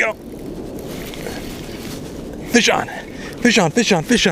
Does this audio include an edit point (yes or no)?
no